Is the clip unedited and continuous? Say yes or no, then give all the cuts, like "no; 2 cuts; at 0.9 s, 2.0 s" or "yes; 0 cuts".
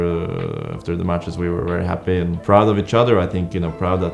yes; 0 cuts